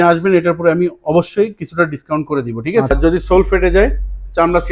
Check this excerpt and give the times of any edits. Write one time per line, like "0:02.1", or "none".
0:02.9